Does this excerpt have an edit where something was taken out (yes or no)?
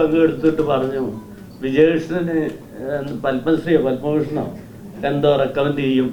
no